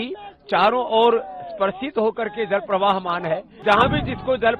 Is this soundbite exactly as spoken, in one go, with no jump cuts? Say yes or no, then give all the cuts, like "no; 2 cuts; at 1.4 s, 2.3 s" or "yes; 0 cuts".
no; 1 cut; at 3.5 s